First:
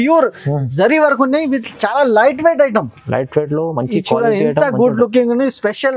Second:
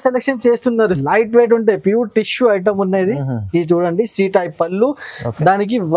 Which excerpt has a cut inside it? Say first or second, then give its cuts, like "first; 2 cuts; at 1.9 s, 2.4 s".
second; 1 cut; at 0.9 s